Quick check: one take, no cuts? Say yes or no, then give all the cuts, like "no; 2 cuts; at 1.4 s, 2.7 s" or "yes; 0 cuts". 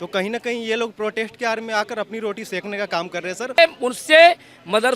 no; 1 cut; at 3.6 s